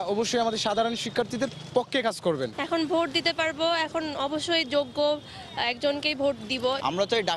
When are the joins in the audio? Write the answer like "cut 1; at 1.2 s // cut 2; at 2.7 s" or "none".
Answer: none